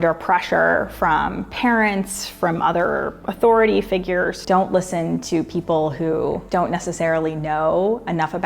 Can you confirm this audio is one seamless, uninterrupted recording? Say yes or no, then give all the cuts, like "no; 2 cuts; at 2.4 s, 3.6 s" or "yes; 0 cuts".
no; 1 cut; at 4.4 s